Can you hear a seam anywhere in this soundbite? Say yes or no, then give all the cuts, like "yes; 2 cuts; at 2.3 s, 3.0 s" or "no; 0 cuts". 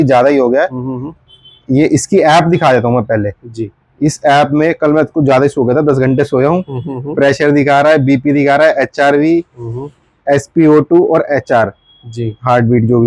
no; 0 cuts